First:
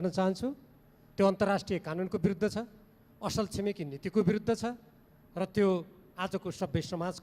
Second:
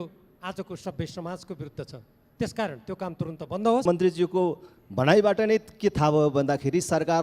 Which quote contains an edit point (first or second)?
second